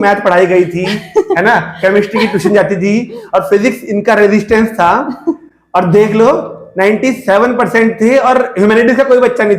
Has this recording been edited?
no; 0 cuts

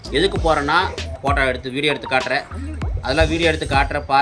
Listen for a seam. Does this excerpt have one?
yes; 1 cut; at 1.1 s

